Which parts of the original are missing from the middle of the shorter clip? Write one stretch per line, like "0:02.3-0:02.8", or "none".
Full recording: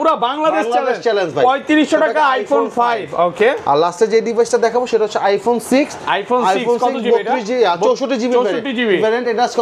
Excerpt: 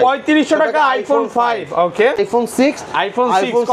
0:03.6-0:05.3